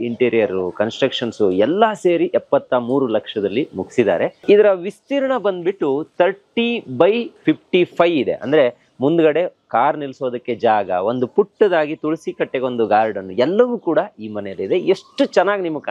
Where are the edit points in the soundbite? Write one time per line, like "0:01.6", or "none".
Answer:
none